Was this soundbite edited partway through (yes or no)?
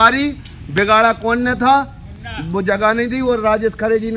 no